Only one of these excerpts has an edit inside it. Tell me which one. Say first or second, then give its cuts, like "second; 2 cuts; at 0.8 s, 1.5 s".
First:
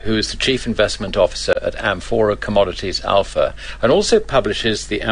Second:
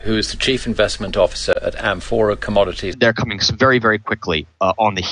first; 1 cut; at 2.9 s